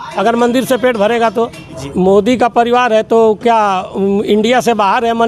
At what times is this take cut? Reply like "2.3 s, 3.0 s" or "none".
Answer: 1.8 s